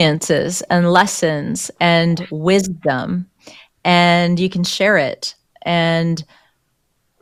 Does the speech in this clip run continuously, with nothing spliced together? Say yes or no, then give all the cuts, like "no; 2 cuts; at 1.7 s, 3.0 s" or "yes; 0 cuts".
yes; 0 cuts